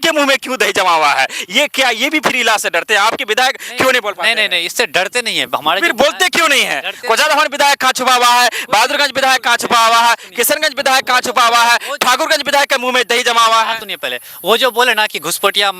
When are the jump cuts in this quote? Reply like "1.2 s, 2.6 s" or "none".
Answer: none